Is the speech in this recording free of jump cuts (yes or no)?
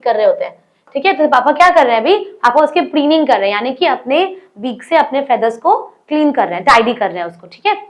yes